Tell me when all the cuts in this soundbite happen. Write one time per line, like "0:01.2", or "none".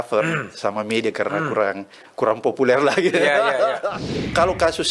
0:04.0